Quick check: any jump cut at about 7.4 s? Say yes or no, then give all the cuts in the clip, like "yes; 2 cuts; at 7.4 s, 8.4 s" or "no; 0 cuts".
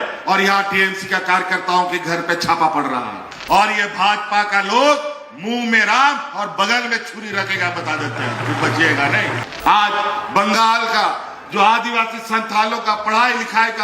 no; 2 cuts; at 3.3 s, 9.4 s